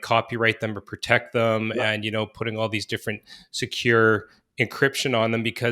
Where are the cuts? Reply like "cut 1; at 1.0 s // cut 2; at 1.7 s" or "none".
none